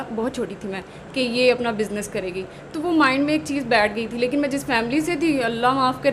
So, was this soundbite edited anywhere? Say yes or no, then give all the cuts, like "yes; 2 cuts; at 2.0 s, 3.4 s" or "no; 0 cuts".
no; 0 cuts